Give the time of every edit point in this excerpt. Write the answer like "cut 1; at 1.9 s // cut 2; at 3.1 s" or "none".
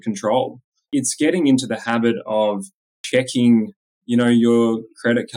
cut 1; at 0.8 s // cut 2; at 2.9 s